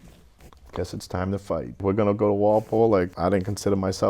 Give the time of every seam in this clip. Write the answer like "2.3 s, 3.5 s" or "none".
1.7 s, 3.1 s

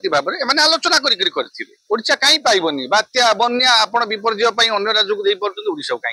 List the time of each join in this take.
1.7 s

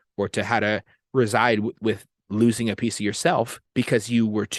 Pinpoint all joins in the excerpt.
3.6 s

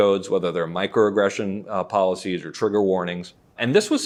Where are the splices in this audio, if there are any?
none

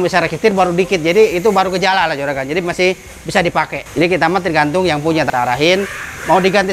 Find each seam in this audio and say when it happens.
3.8 s, 5.3 s

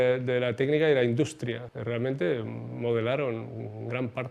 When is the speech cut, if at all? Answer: 1.7 s

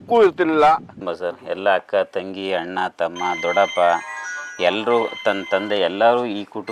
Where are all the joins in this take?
1.0 s

